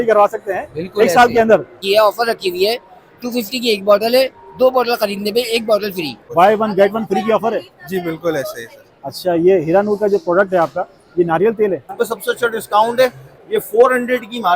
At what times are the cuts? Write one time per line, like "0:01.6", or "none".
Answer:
0:01.8
0:06.2
0:11.9